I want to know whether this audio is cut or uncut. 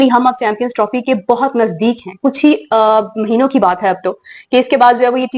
uncut